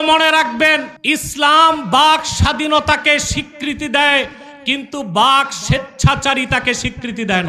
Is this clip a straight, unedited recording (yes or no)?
no